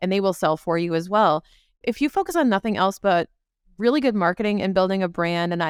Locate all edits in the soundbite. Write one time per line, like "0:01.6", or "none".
none